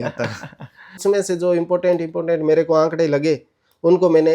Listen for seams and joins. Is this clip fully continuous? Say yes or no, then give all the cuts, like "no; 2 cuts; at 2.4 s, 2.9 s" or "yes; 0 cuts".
no; 1 cut; at 1.0 s